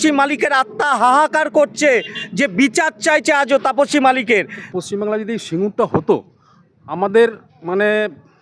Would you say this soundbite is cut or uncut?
cut